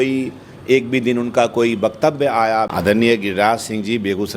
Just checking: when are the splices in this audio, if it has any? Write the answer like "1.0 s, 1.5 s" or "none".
2.7 s